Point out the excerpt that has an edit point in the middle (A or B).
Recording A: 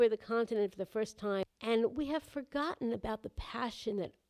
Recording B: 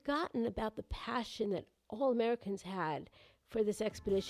A